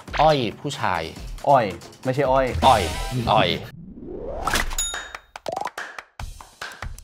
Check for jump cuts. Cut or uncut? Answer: cut